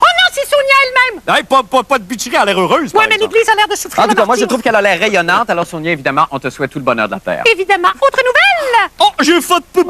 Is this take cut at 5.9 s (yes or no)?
no